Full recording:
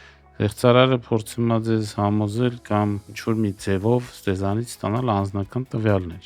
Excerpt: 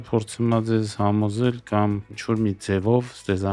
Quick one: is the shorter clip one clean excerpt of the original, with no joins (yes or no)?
yes